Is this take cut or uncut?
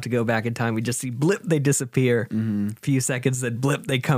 uncut